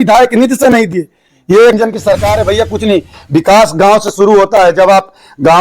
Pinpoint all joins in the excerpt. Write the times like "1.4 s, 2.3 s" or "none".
1.7 s